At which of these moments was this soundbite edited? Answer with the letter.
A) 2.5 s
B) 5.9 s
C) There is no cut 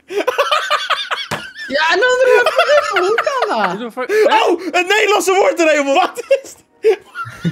B